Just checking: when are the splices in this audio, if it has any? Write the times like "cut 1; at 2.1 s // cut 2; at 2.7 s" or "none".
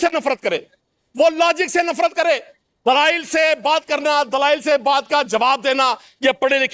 none